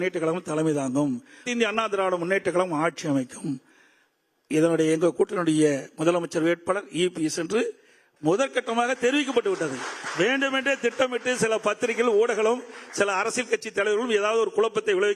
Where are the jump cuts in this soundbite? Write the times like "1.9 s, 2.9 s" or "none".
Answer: 1.4 s